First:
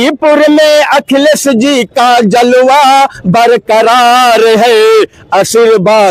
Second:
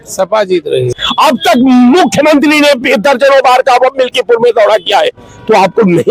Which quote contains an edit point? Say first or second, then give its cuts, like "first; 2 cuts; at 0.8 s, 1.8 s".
second; 1 cut; at 1.0 s